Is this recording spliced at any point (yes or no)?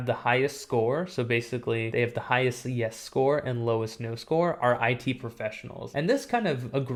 no